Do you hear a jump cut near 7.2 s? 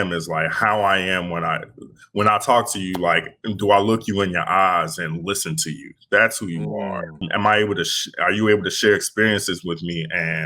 yes; 1 cut; at 7.2 s

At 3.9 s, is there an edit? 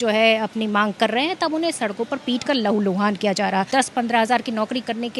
yes; 1 cut; at 3.9 s

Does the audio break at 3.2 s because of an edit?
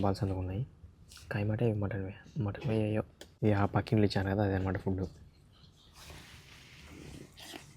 yes; 1 cut; at 3.2 s

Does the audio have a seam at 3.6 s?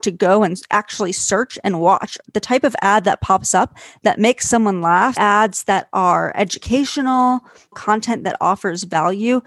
no; 3 cuts; at 2.2 s, 5.2 s, 7.8 s

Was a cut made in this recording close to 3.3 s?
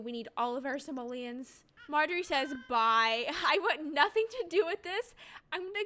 no; 1 cut; at 1.7 s

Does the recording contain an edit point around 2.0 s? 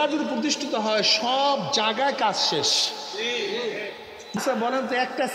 no; 1 cut; at 4.4 s

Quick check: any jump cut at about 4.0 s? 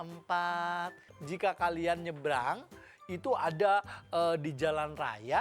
no; 1 cut; at 1.0 s

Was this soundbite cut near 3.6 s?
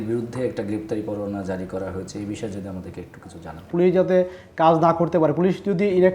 yes; 1 cut; at 3.6 s

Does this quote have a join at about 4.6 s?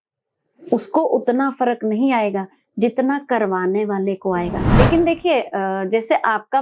yes; 1 cut; at 4.6 s

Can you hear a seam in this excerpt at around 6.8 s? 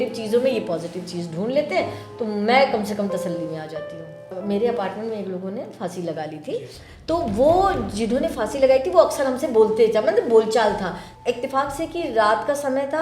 no; 2 cuts; at 4.4 s, 11.1 s

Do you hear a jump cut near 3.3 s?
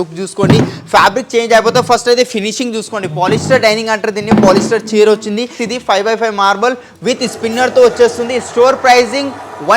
no; 1 cut; at 5.6 s

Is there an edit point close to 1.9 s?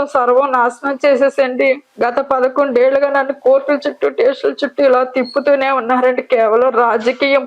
yes; 1 cut; at 1.9 s

